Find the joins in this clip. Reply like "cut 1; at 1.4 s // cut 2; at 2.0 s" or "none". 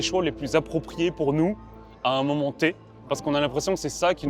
none